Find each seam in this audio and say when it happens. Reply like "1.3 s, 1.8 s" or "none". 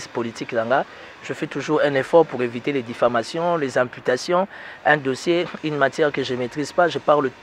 none